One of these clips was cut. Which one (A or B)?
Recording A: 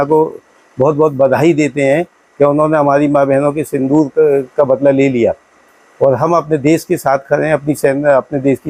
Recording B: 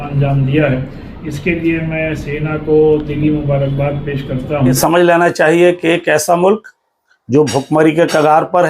B